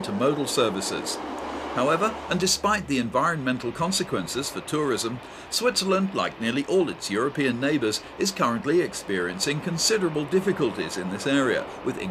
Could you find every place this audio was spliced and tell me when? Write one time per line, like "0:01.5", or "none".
0:03.1